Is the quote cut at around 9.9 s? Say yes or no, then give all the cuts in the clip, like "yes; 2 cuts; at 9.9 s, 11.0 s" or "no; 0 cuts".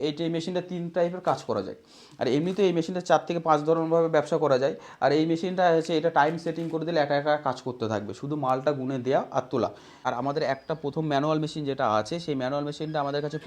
yes; 1 cut; at 9.9 s